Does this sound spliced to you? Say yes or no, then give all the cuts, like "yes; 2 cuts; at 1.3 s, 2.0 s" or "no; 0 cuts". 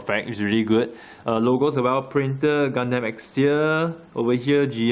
no; 0 cuts